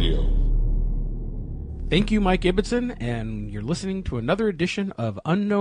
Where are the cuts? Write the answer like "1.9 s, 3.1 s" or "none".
2.4 s